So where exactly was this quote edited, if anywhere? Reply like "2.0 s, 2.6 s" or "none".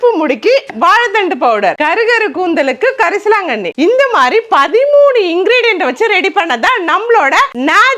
1.8 s, 3.7 s